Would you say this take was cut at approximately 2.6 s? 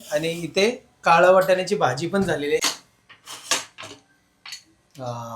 yes; 1 cut; at 2.6 s

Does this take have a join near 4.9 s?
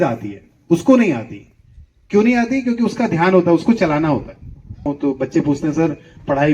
yes; 1 cut; at 4.9 s

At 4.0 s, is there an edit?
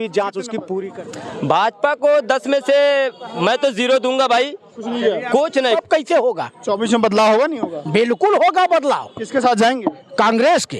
no; 2 cuts; at 1.0 s, 5.8 s

